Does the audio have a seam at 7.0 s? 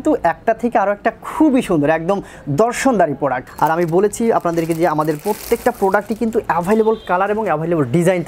no; 1 cut; at 3.4 s

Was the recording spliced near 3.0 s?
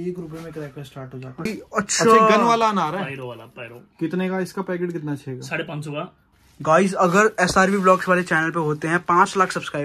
no; 2 cuts; at 1.5 s, 6.2 s

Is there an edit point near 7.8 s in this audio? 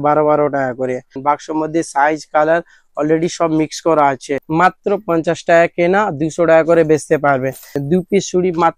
yes; 3 cuts; at 1.1 s, 4.3 s, 7.8 s

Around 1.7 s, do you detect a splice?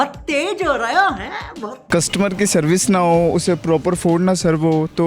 yes; 1 cut; at 1.7 s

